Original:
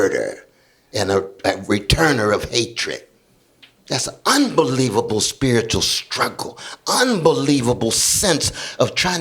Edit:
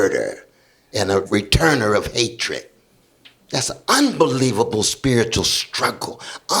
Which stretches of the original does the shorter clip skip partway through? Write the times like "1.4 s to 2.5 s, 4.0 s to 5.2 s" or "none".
1.3 s to 1.6 s